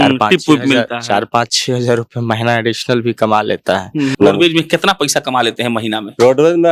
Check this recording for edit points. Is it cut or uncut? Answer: cut